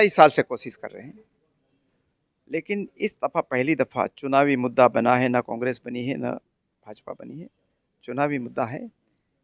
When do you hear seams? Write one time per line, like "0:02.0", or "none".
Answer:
none

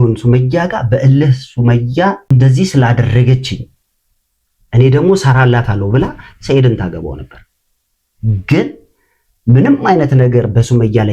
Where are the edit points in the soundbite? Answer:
0:02.3

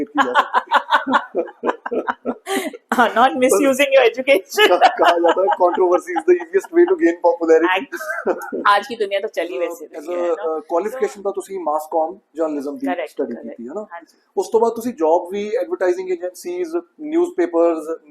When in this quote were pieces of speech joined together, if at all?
0:10.2

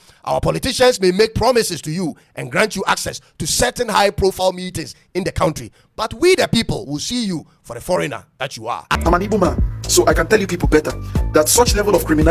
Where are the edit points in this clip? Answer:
0:08.9

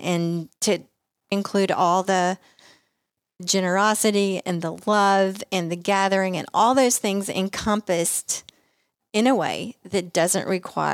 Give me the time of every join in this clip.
0:01.3

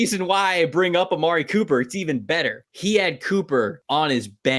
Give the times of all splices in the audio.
0:02.7
0:03.8

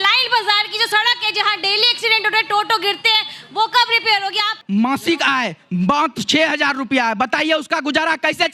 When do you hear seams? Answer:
0:04.6

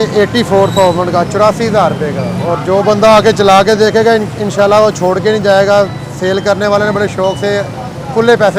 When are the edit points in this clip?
0:02.4

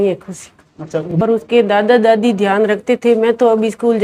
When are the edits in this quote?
0:01.1

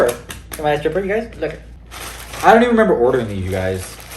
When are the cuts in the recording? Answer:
0:01.7

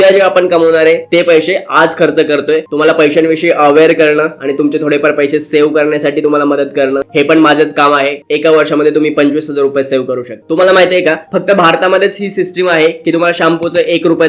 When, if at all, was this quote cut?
0:02.7
0:07.1
0:08.2
0:10.4

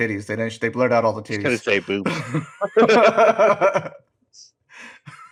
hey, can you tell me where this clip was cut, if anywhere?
none

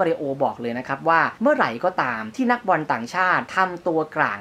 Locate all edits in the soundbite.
0:01.3
0:02.2
0:03.5

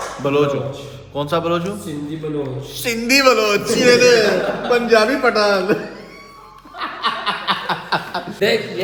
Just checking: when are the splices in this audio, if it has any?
none

